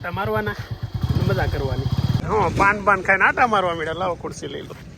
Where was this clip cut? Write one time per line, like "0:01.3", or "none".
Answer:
0:02.2